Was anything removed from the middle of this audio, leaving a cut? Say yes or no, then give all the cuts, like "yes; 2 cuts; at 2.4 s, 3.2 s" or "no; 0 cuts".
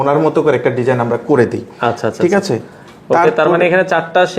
no; 0 cuts